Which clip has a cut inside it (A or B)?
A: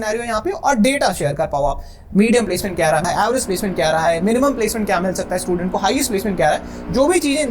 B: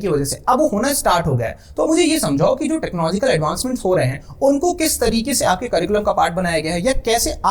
A